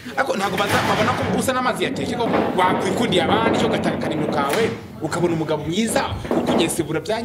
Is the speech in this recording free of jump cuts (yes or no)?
no